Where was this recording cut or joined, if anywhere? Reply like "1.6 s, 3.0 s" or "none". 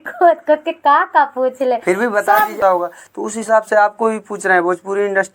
2.5 s